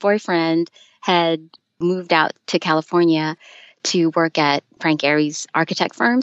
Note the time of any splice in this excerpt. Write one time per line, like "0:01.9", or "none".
none

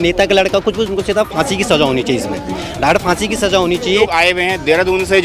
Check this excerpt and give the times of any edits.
0:04.1

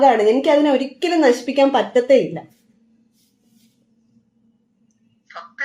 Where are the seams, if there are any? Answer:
none

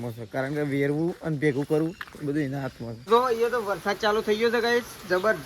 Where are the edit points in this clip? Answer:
0:03.1

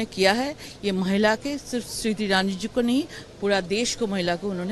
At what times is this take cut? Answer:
none

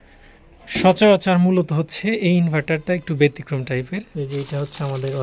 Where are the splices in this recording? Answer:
0:04.1

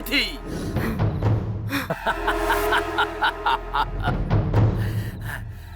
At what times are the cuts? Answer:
0:01.8

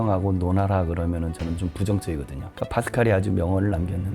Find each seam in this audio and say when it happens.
0:02.4

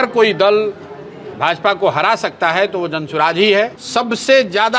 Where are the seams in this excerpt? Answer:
0:03.8

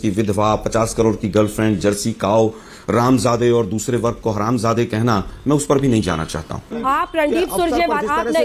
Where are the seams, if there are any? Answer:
0:06.8

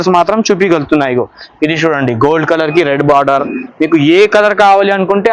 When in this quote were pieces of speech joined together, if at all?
none

